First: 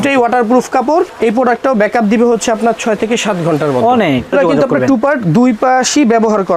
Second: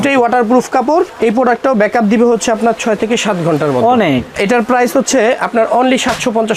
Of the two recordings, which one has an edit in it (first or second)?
first